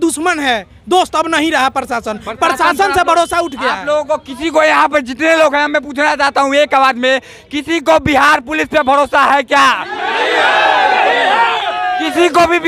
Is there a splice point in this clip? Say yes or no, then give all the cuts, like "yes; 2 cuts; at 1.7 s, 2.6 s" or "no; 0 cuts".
no; 0 cuts